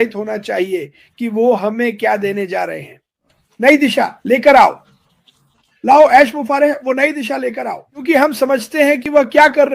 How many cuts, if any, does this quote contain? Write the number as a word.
one